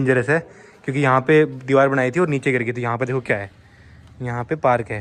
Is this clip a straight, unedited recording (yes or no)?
yes